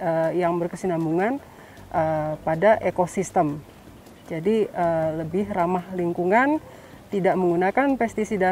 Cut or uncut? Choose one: uncut